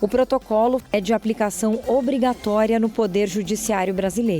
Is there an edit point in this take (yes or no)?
yes